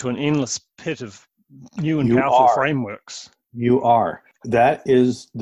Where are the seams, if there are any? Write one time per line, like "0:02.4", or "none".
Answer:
0:04.2